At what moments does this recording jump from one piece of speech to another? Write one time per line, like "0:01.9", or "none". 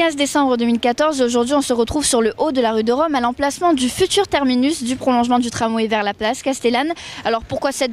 none